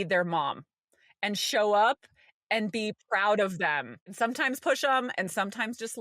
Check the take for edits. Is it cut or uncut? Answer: cut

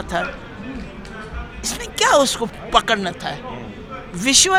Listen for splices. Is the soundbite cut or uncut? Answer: uncut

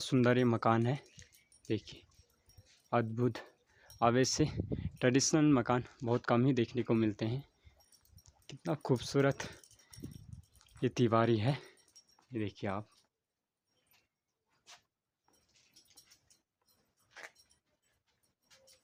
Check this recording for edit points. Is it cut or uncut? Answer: uncut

